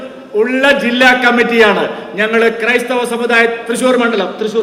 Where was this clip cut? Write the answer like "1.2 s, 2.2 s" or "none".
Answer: none